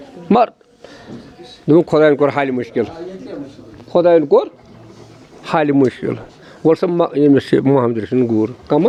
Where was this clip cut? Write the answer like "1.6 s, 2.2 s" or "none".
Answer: none